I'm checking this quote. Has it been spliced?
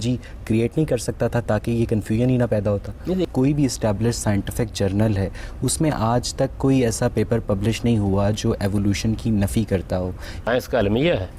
yes; 2 cuts; at 3.3 s, 10.4 s

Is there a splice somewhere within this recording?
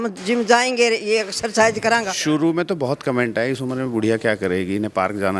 yes; 1 cut; at 2.1 s

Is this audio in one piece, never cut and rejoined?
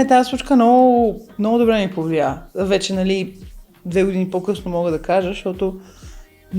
yes; 0 cuts

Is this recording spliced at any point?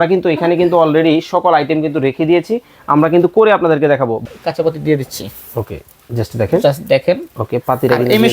yes; 1 cut; at 4.2 s

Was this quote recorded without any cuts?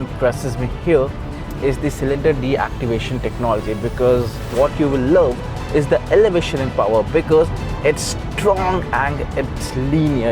no; 1 cut; at 4.4 s

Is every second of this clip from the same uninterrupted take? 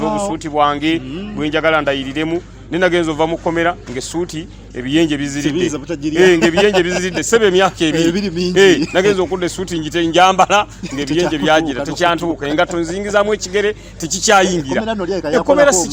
yes; 0 cuts

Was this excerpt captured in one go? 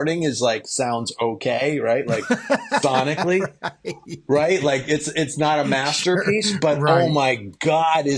yes; 0 cuts

